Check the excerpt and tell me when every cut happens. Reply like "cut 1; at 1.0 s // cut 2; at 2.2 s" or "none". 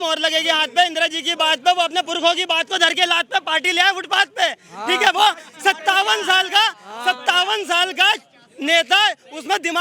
none